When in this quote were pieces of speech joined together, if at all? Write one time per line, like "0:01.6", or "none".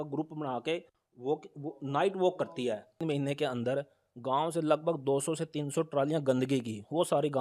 0:03.0